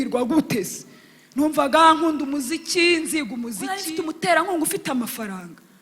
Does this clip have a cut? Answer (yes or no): yes